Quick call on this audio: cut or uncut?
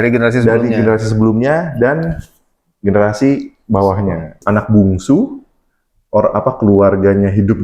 cut